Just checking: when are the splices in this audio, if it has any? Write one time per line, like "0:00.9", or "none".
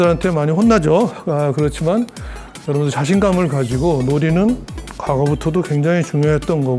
none